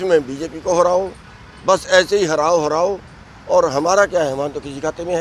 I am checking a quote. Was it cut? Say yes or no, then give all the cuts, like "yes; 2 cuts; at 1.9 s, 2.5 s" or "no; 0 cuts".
no; 0 cuts